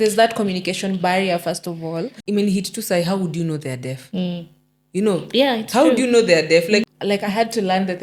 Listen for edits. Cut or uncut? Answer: cut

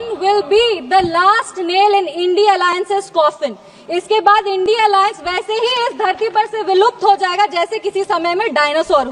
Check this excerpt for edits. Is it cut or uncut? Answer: uncut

